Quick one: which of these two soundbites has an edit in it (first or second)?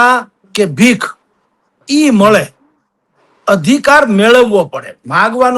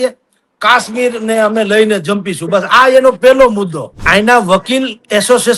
second